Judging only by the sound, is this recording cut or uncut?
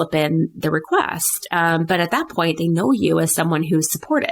uncut